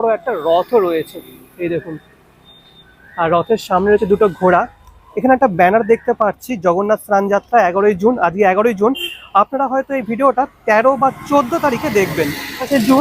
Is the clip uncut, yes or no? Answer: yes